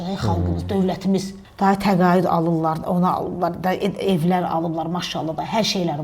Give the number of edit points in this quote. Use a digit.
1